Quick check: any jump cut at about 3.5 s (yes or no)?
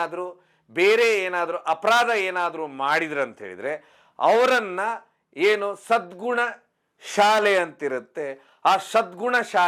no